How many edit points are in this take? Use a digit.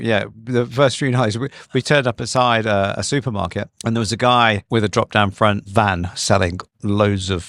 3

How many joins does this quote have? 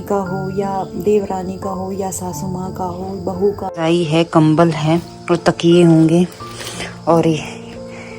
1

